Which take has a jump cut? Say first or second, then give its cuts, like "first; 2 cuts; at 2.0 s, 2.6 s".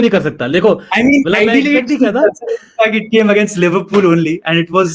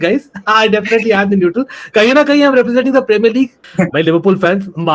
second; 1 cut; at 3.6 s